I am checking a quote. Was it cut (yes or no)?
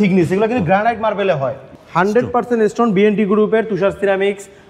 yes